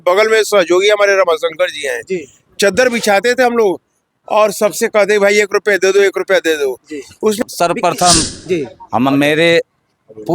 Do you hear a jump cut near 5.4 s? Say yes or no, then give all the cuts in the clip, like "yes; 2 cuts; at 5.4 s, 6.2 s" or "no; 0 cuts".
no; 1 cut; at 7.4 s